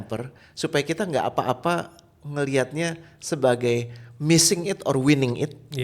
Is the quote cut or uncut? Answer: uncut